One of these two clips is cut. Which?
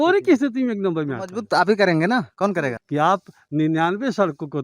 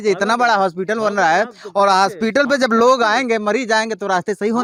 first; 1 cut; at 2.8 s

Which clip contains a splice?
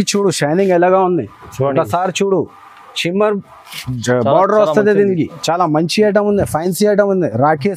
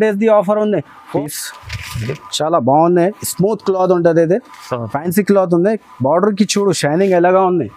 second; 1 cut; at 1.2 s

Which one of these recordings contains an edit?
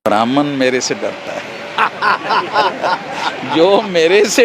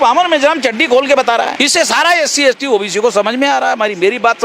second; 1 cut; at 1.6 s

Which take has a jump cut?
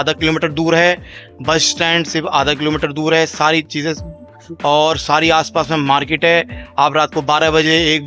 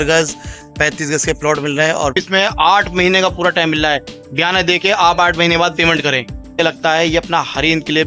second; 2 cuts; at 2.1 s, 6.6 s

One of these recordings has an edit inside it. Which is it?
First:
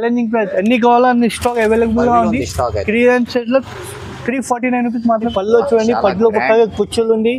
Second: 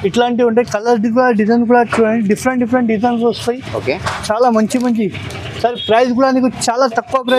first; 1 cut; at 5.3 s

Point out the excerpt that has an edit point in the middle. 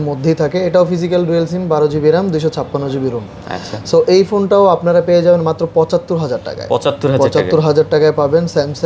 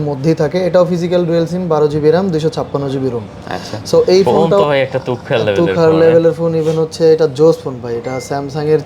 second; 1 cut; at 4.4 s

